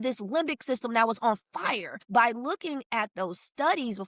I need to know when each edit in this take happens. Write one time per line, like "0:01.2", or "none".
0:02.0